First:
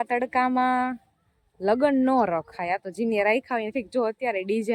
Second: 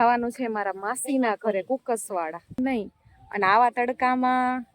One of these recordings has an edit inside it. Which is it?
second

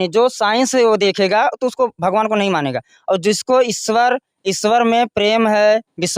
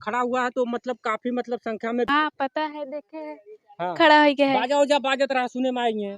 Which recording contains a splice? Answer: second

